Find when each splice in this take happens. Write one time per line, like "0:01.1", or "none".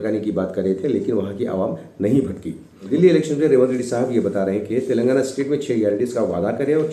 0:02.9